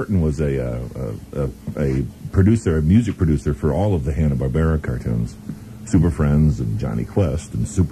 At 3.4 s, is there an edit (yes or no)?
yes